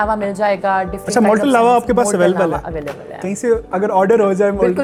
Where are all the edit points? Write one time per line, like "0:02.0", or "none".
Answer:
none